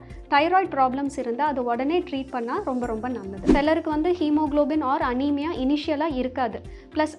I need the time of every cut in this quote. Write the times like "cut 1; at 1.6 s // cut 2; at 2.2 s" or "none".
cut 1; at 3.4 s